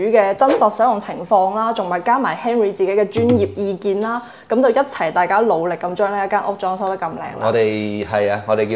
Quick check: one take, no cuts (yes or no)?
yes